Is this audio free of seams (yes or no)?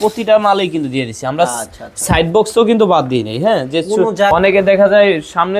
no